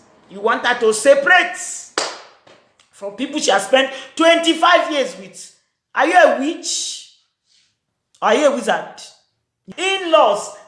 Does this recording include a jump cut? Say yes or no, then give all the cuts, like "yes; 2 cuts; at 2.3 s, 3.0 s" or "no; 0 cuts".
yes; 1 cut; at 9.6 s